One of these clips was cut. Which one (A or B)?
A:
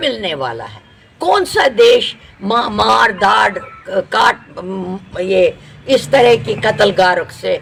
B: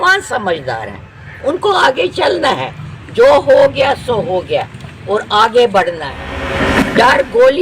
B